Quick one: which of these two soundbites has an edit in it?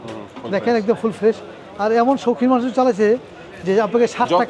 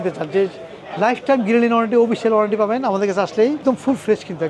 second; 1 cut; at 3.6 s

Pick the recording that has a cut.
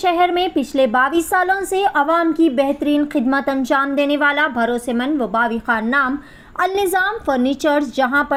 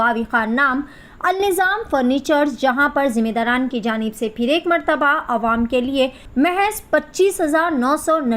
second; 1 cut; at 6.2 s

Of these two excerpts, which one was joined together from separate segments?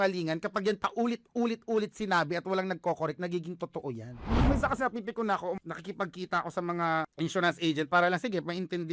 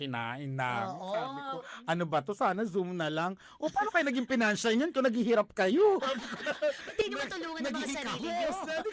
first; 3 cuts; at 4.4 s, 5.6 s, 7.1 s

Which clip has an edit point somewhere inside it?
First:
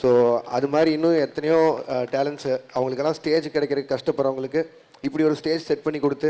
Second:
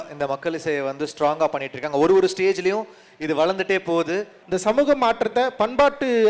second; 1 cut; at 4.3 s

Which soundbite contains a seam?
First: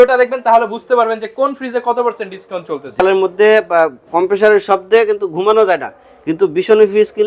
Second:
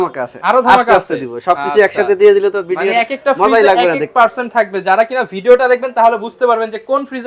first; 1 cut; at 3.0 s

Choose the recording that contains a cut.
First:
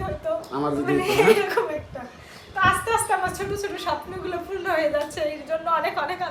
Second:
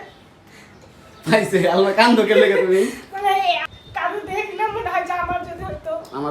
second; 1 cut; at 3.6 s

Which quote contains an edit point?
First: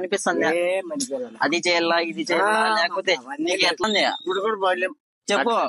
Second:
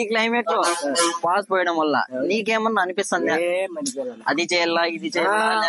first; 1 cut; at 3.8 s

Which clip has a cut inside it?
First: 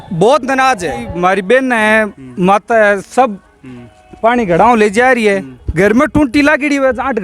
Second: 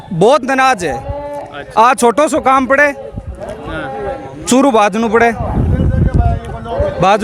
first; 1 cut; at 1.2 s

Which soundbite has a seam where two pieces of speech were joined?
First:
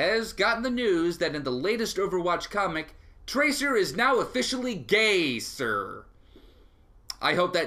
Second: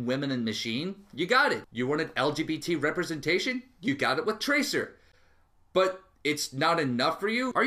first; 1 cut; at 1.6 s

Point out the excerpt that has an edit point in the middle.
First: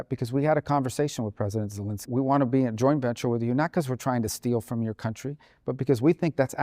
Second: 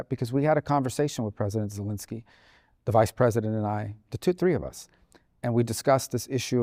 first; 1 cut; at 2.0 s

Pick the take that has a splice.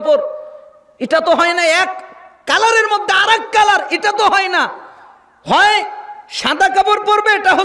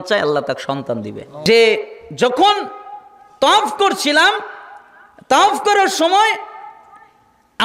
second; 1 cut; at 1.3 s

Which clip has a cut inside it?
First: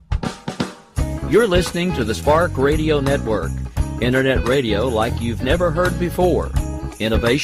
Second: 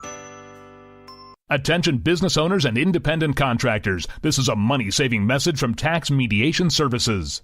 second; 1 cut; at 0.9 s

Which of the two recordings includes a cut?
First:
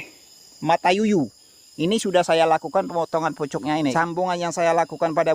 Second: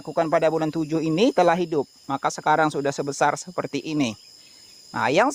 first; 1 cut; at 3.9 s

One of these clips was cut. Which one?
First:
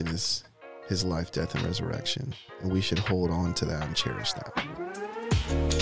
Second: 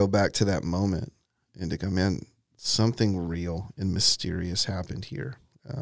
first; 2 cuts; at 2.4 s, 4.2 s

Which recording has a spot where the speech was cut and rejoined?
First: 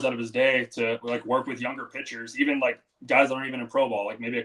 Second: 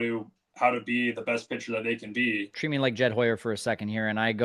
second; 1 cut; at 2.5 s

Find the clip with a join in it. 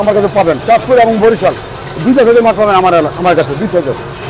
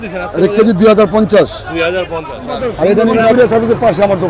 second; 1 cut; at 3.3 s

